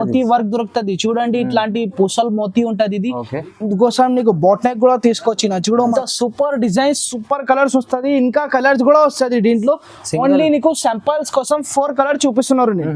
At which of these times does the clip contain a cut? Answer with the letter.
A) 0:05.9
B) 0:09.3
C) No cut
A